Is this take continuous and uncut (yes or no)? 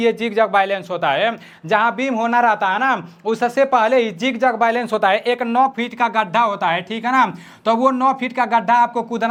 yes